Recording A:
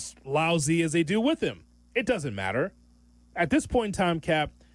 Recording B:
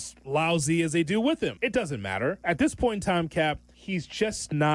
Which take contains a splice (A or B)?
B